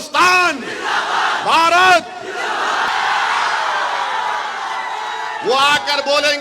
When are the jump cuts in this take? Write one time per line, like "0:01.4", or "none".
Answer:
0:02.9